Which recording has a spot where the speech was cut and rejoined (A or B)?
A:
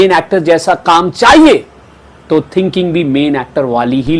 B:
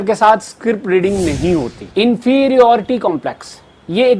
B